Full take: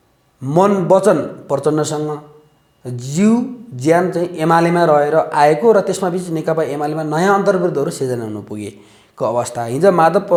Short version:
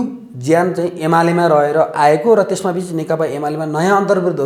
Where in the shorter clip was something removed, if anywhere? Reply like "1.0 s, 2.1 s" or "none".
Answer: none